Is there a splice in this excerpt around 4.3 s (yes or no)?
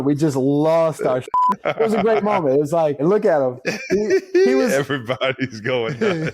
no